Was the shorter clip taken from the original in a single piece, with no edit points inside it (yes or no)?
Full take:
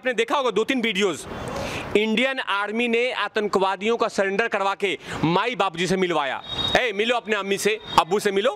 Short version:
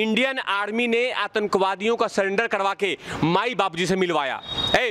yes